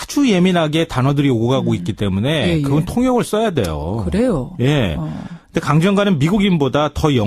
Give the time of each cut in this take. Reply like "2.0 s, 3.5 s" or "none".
5.8 s